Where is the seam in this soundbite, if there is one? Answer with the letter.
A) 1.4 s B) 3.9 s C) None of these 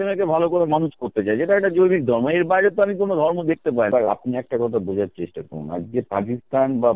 B